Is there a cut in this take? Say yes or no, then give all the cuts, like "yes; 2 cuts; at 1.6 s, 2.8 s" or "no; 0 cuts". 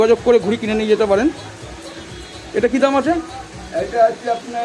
no; 0 cuts